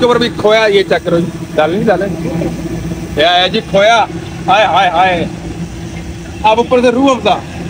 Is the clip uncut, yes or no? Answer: yes